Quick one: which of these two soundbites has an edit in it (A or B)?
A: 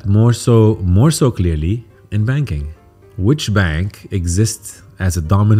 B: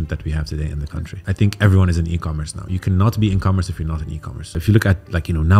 B